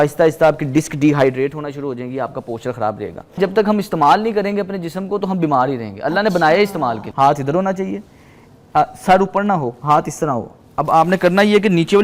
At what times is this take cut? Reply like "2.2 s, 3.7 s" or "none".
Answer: 3.4 s, 7.0 s